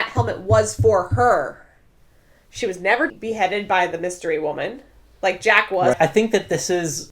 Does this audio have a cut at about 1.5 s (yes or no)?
no